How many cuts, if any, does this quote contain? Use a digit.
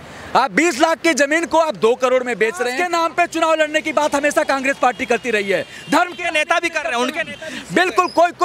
1